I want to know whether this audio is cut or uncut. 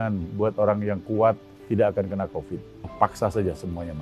cut